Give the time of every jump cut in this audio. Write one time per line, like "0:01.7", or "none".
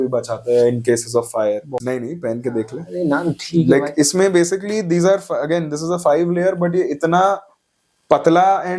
0:01.7